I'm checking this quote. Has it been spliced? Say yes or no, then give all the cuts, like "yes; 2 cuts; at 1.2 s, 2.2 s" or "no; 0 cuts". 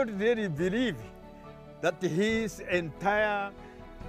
no; 0 cuts